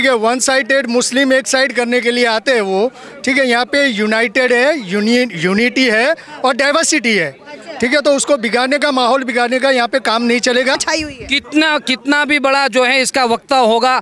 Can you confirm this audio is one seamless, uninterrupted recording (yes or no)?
no